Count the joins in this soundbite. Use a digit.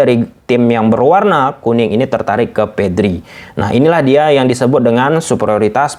0